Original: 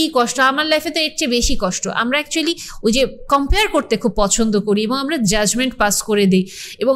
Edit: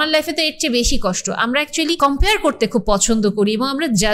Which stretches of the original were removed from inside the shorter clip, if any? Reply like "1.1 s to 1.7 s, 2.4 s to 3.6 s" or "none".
2.5 s to 3.3 s